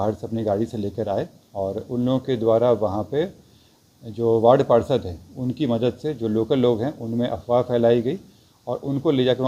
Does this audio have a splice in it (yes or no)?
no